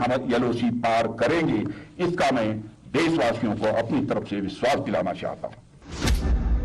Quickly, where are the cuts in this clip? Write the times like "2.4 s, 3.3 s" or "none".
5.5 s